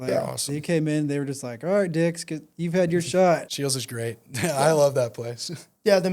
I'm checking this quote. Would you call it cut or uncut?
cut